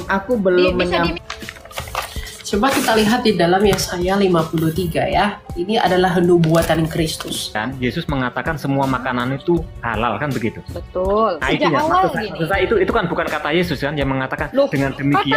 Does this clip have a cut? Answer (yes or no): yes